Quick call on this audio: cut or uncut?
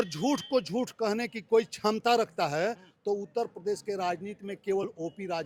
uncut